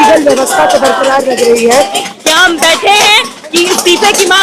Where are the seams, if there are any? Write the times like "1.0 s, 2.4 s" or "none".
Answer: 2.1 s